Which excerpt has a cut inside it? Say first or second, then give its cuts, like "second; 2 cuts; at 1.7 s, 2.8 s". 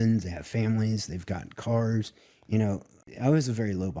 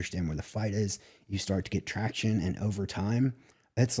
first; 1 cut; at 3.0 s